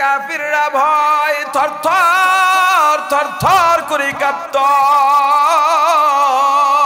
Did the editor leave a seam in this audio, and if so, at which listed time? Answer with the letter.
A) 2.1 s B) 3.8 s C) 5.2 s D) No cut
D